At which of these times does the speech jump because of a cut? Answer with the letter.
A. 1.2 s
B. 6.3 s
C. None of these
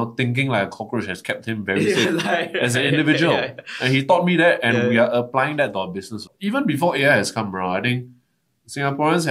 B